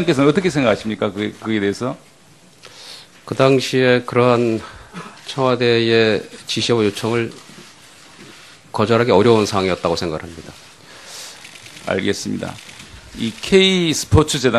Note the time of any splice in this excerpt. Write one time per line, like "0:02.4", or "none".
none